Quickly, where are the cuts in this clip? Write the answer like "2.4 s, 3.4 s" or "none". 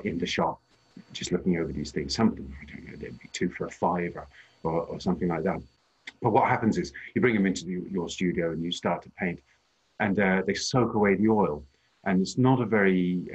5.7 s

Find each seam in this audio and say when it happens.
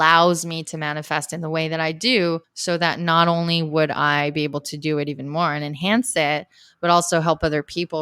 2.5 s

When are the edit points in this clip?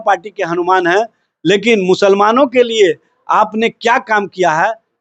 none

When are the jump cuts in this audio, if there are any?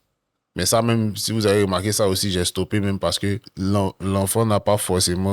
3.5 s

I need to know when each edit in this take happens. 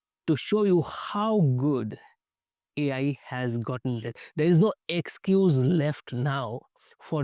4.1 s

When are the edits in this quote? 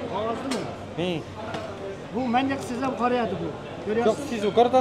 2.0 s

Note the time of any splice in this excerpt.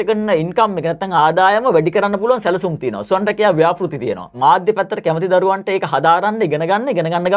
4.3 s

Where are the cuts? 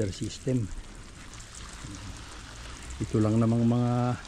1.3 s

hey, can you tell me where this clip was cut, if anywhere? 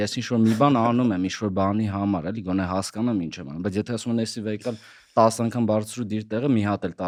none

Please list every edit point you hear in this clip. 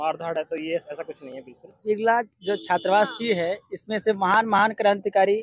1.8 s

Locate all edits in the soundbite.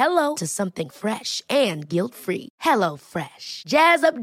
none

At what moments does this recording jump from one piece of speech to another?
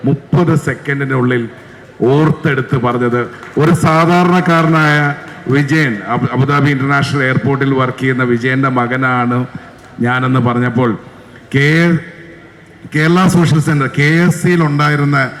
none

